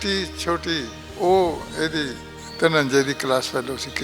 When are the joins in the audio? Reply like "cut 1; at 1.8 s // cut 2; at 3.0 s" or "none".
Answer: cut 1; at 1.0 s